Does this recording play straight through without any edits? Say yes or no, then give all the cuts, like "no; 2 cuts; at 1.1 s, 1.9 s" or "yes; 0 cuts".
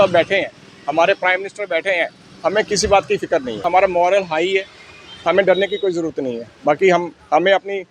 no; 1 cut; at 3.6 s